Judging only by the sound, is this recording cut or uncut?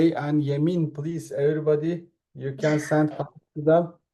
uncut